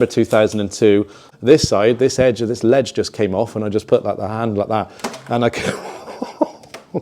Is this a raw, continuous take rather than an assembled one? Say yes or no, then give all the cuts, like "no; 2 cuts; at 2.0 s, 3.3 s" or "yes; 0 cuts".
no; 1 cut; at 1.2 s